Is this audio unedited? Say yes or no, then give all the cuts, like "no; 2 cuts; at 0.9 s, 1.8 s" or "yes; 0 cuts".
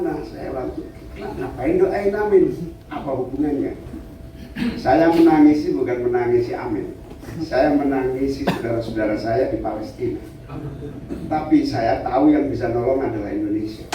yes; 0 cuts